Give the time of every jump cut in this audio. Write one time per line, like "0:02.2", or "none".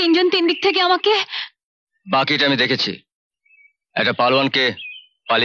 none